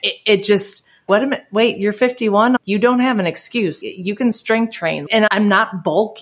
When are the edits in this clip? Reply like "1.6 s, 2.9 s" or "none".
1.1 s, 2.6 s, 3.8 s, 5.2 s